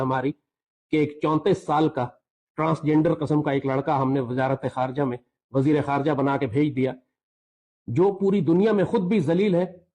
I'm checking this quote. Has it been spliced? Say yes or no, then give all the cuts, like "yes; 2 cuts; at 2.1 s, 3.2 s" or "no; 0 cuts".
no; 0 cuts